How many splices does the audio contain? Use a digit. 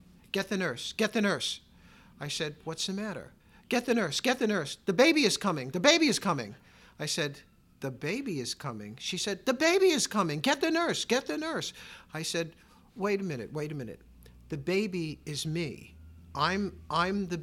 1